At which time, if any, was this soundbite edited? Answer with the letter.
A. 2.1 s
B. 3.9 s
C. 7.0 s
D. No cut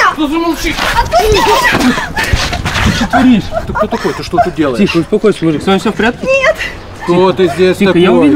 D